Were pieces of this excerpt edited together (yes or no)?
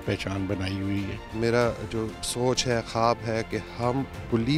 yes